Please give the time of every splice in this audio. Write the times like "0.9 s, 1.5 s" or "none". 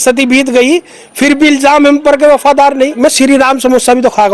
3.0 s